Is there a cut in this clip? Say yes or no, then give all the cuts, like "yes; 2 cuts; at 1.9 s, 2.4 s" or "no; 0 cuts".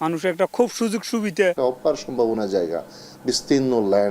yes; 1 cut; at 1.6 s